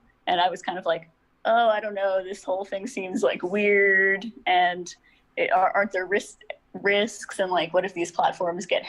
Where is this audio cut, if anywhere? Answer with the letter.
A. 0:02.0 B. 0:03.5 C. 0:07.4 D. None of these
C